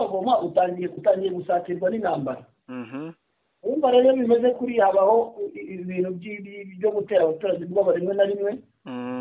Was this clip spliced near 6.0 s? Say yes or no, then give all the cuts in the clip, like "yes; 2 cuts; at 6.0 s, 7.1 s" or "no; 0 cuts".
no; 1 cut; at 1.0 s